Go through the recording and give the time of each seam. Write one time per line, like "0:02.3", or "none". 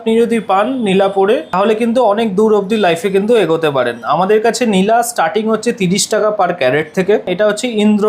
0:01.5
0:07.3

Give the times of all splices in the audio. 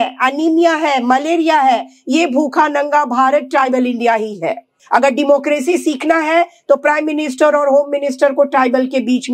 0:04.7

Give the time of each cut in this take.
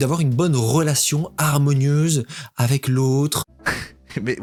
none

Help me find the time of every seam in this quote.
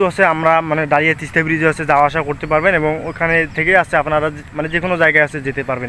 none

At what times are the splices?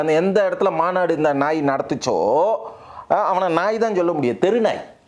none

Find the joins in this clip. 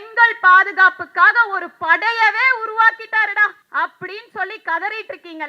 0:03.6

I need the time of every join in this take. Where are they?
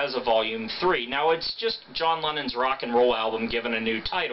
0:02.6

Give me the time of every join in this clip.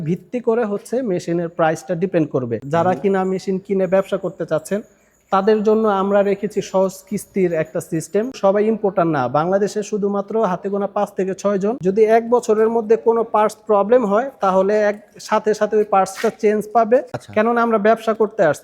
0:02.6
0:08.3
0:11.8
0:17.2

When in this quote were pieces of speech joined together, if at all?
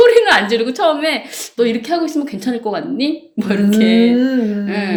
none

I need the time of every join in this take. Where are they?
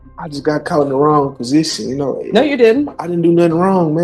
none

